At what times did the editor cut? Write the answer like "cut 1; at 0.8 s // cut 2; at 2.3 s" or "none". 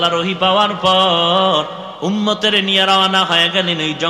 cut 1; at 1.8 s